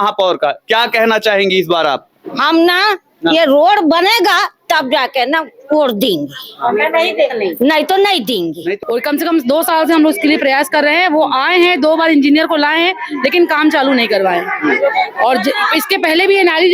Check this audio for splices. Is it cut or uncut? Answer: cut